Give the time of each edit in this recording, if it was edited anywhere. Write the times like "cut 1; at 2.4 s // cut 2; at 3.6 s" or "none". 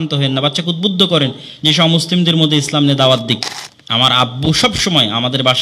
cut 1; at 3.5 s